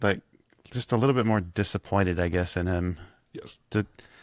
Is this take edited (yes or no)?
no